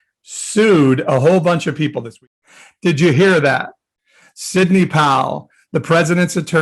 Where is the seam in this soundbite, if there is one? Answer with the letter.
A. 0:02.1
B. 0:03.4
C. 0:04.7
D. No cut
A